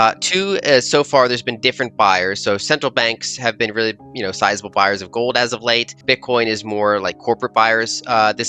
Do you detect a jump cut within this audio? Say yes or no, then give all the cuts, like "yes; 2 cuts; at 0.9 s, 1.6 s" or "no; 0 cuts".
yes; 1 cut; at 6.0 s